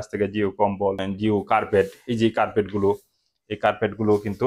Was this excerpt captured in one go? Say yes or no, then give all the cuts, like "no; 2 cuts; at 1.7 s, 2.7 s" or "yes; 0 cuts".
no; 1 cut; at 1.1 s